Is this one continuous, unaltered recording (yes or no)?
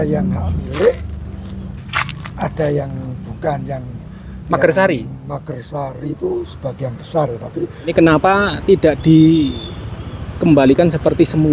no